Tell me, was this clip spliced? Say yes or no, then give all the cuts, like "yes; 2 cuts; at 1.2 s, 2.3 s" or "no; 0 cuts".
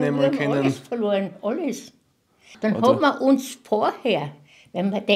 yes; 1 cut; at 2.5 s